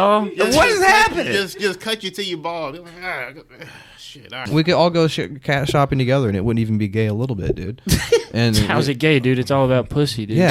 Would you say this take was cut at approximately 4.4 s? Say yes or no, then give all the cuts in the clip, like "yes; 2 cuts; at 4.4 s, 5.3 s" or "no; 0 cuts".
yes; 1 cut; at 4.4 s